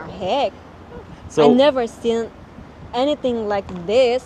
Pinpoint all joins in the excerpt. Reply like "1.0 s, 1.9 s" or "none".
none